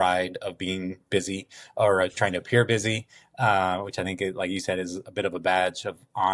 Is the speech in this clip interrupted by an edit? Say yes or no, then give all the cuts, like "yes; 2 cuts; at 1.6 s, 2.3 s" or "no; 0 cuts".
no; 0 cuts